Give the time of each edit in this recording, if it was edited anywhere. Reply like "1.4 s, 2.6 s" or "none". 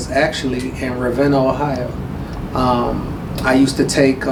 none